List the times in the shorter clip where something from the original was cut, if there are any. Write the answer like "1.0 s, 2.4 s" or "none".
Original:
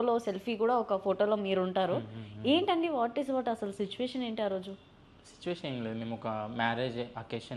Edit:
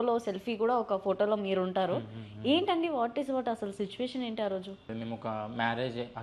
4.9 s